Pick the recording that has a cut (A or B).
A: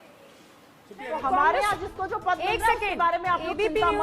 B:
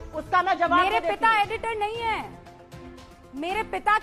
A